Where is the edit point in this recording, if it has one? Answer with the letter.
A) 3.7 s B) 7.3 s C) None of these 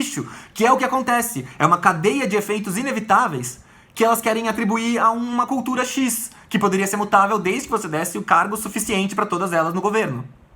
C